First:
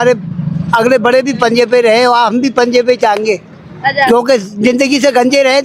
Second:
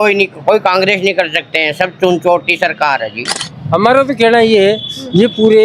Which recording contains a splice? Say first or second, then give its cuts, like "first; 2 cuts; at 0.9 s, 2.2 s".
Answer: second; 1 cut; at 3.5 s